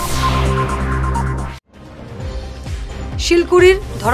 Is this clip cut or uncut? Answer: uncut